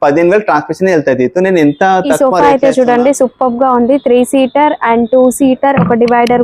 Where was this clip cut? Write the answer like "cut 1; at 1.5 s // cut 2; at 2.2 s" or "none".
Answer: cut 1; at 2.2 s